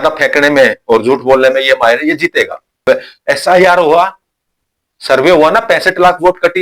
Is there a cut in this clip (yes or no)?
yes